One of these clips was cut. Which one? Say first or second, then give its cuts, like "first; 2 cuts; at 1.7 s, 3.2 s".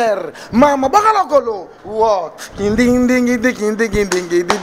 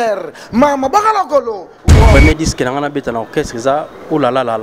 second; 1 cut; at 2.1 s